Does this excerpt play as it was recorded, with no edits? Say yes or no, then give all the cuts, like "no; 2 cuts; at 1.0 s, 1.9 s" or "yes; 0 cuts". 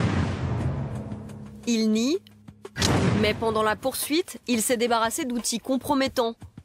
no; 1 cut; at 3.3 s